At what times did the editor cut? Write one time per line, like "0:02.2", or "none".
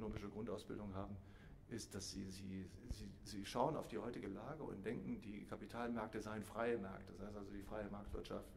none